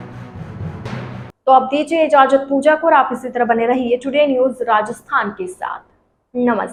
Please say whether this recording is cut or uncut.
uncut